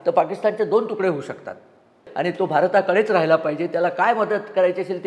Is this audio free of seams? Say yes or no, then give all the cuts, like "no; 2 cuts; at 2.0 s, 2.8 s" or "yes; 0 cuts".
no; 1 cut; at 2.0 s